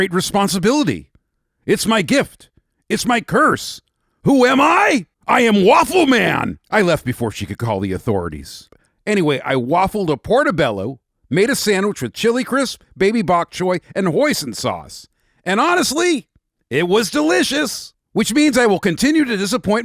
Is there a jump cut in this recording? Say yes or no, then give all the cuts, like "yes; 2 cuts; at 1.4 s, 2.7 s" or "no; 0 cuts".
yes; 1 cut; at 8.8 s